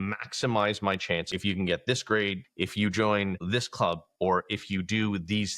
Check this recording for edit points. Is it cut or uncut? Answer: cut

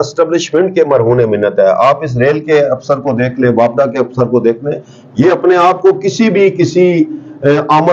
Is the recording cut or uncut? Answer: uncut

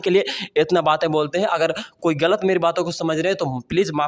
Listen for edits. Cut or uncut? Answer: uncut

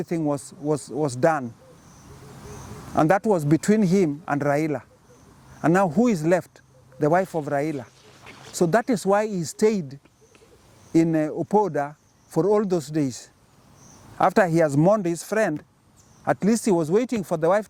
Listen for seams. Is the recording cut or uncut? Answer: uncut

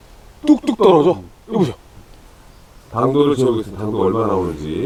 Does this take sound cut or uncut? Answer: uncut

